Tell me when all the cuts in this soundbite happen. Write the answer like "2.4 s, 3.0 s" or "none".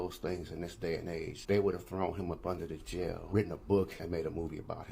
1.3 s, 3.2 s, 4.0 s